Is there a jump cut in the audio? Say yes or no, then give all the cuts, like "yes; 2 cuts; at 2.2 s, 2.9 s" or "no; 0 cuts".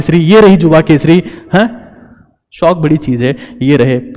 no; 0 cuts